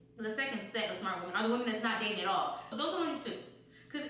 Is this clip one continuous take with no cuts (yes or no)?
no